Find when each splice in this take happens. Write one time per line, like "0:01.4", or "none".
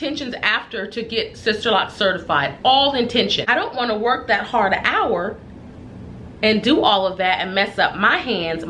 0:03.4